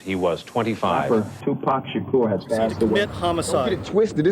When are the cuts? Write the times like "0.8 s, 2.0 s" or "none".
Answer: 1.0 s